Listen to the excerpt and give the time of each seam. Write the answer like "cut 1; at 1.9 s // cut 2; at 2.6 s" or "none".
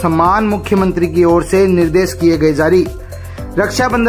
none